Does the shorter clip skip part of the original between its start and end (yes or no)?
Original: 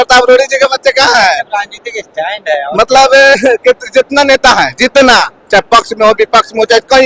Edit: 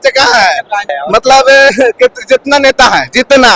yes